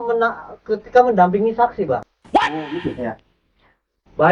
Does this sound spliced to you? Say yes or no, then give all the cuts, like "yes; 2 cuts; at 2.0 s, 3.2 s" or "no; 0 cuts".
no; 0 cuts